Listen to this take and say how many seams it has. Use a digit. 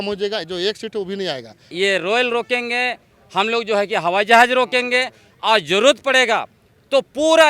1